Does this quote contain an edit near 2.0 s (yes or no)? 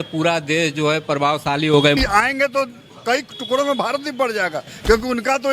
yes